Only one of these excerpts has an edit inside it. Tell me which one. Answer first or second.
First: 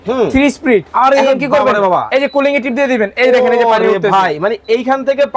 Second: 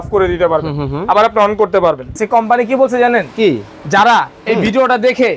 second